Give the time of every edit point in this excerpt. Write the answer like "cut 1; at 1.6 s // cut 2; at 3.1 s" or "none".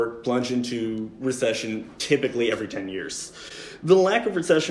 none

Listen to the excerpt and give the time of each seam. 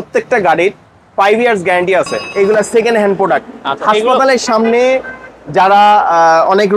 cut 1; at 2.2 s

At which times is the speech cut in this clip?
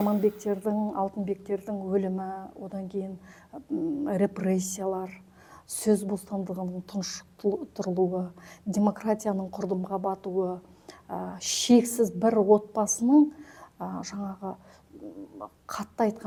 none

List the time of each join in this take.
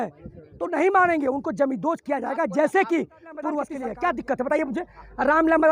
cut 1; at 3.7 s

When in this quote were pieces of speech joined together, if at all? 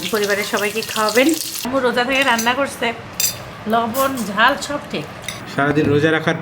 cut 1; at 1.7 s // cut 2; at 5.4 s

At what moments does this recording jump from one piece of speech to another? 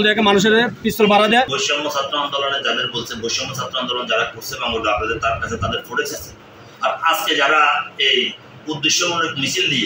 cut 1; at 1.6 s

